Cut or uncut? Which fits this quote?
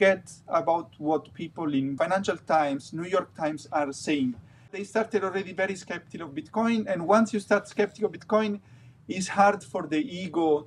cut